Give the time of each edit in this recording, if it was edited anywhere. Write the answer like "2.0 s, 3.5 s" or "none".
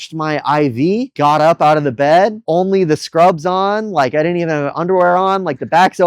1.1 s, 2.4 s